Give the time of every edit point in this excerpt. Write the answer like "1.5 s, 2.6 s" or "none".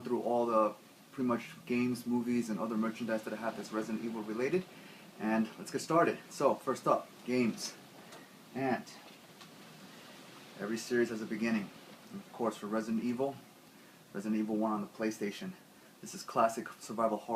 none